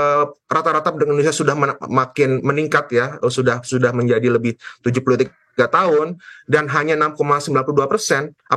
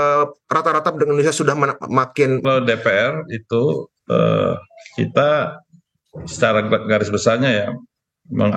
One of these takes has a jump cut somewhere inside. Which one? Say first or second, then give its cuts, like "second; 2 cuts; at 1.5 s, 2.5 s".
second; 1 cut; at 2.4 s